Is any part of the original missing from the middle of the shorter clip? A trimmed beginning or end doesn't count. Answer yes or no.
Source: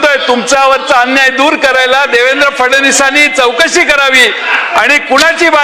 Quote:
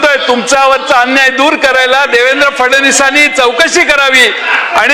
no